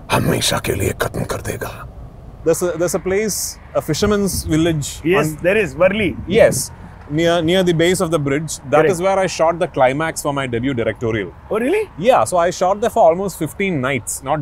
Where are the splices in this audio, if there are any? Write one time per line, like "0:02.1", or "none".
0:02.3